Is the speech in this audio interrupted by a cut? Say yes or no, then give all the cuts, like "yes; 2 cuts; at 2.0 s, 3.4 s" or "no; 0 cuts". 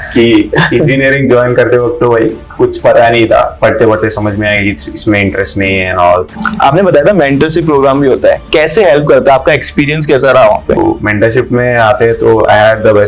yes; 3 cuts; at 3.5 s, 6.3 s, 10.8 s